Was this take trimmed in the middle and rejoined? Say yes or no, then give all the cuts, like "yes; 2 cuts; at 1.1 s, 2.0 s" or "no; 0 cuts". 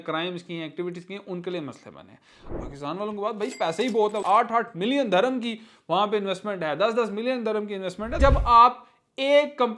yes; 3 cuts; at 2.5 s, 4.2 s, 8.2 s